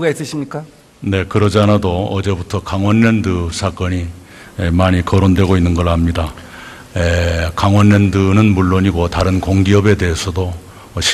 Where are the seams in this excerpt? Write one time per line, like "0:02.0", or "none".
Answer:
none